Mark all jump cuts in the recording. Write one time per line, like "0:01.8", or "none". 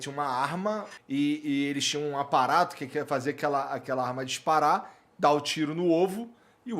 0:00.9